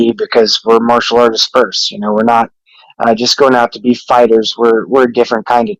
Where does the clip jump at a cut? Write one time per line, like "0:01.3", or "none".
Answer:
none